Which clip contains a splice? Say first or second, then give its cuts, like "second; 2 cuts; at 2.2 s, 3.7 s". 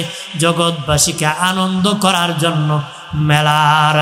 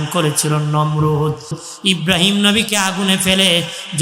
second; 1 cut; at 1.6 s